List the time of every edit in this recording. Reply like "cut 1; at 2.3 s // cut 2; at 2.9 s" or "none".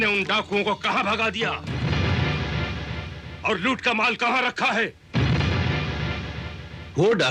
none